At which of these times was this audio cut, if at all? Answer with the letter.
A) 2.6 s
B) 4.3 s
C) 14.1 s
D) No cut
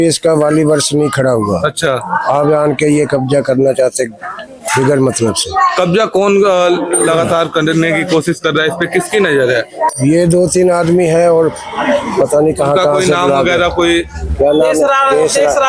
D